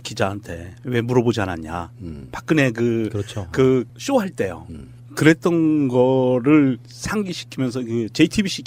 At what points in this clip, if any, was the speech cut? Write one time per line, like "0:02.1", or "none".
none